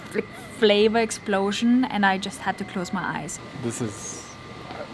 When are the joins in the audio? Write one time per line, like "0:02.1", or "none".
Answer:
0:03.3